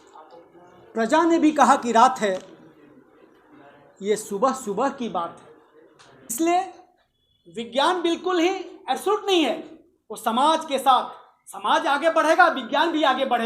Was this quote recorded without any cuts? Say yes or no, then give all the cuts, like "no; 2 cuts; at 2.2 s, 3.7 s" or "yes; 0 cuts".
no; 1 cut; at 6.3 s